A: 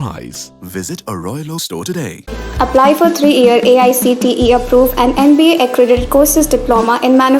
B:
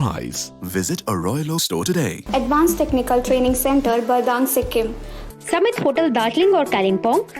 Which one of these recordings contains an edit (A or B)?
B